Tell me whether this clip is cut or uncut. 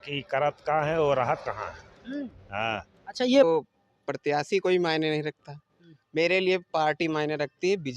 cut